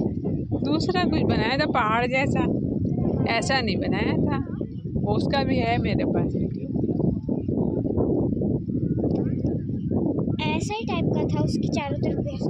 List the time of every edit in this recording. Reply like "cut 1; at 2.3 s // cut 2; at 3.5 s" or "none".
none